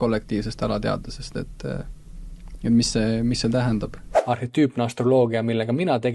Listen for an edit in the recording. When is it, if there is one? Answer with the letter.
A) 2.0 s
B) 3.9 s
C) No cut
C